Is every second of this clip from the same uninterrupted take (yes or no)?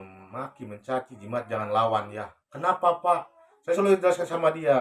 yes